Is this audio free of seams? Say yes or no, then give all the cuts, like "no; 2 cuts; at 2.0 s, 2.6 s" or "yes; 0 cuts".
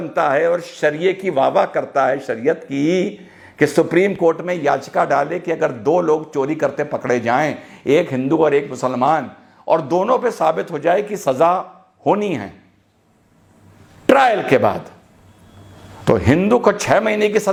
yes; 0 cuts